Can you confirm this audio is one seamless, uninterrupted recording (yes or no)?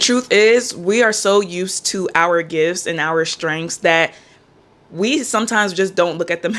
yes